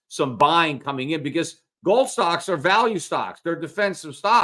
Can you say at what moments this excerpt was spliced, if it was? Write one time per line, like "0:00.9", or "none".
none